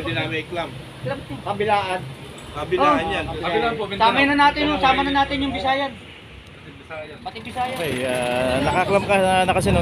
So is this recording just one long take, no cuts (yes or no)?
no